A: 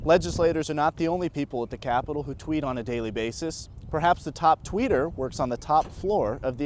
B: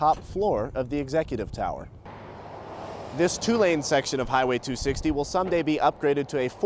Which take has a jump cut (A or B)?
B